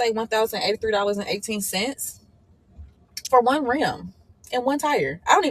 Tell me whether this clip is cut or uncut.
uncut